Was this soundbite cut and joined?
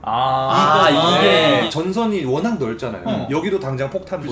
yes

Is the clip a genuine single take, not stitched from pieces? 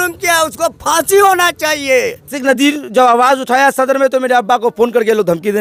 yes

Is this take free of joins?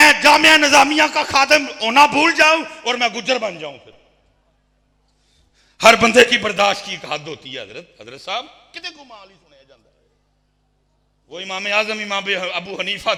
yes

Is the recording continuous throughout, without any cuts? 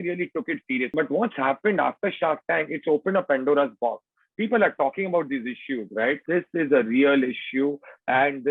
no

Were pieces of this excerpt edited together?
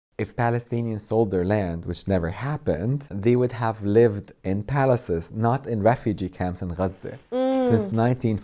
no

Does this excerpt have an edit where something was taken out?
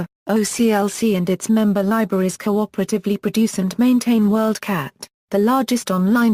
no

